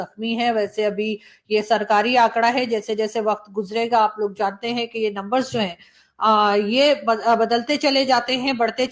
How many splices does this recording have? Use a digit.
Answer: 0